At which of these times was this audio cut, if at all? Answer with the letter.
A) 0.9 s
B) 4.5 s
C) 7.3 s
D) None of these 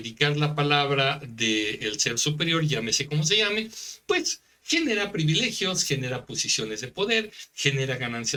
D